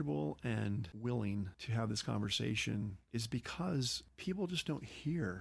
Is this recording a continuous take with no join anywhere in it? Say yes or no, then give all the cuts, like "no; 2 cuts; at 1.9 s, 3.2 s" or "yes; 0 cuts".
no; 4 cuts; at 0.9 s, 1.6 s, 3.0 s, 4.0 s